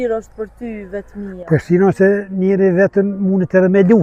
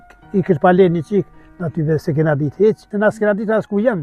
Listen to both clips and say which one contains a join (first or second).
second